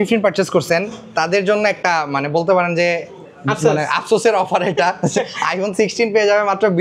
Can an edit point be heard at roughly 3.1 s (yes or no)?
no